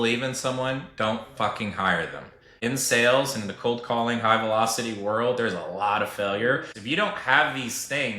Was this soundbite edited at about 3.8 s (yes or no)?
no